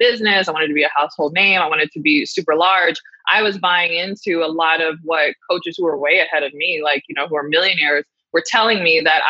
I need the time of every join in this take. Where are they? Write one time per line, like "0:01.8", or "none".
none